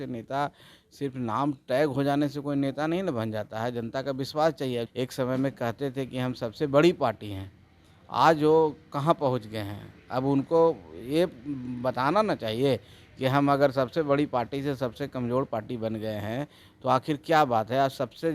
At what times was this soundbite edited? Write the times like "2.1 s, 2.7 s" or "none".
4.9 s